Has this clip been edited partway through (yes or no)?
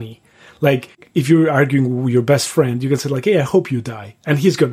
yes